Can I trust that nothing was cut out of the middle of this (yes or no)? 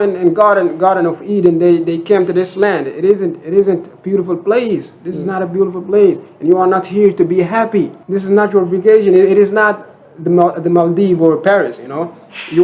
no